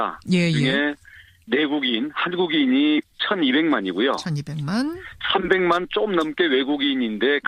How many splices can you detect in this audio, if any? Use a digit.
0